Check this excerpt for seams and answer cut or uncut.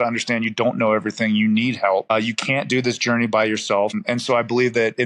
cut